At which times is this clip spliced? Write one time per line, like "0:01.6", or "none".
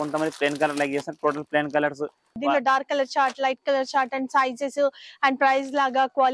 0:02.4